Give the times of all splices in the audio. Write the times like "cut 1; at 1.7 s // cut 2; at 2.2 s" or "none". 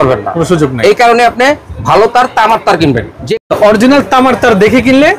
none